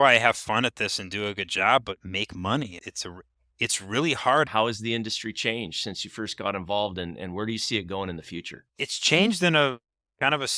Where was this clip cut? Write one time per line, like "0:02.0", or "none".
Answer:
0:04.5
0:08.6